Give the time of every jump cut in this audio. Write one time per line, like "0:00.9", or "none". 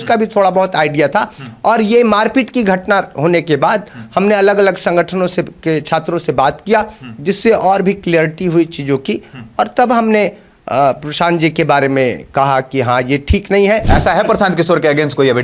0:13.9